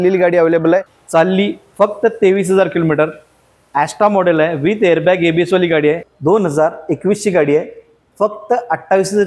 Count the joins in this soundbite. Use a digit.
2